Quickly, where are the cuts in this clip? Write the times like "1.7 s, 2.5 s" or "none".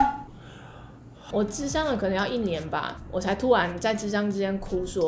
1.2 s, 3.0 s